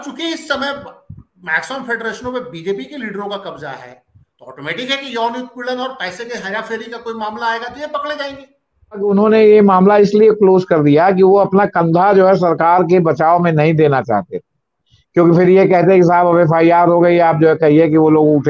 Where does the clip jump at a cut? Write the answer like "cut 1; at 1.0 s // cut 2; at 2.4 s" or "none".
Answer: cut 1; at 9.1 s